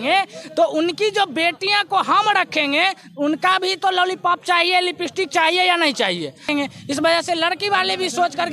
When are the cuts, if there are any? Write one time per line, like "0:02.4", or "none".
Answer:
0:06.5